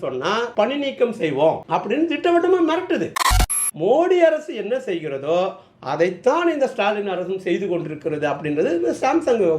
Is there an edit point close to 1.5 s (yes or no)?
no